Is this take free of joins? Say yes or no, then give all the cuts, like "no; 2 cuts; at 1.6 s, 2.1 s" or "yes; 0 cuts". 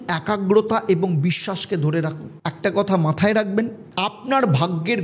no; 1 cut; at 2.3 s